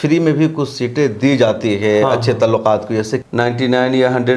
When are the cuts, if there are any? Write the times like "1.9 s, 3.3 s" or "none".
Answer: 3.2 s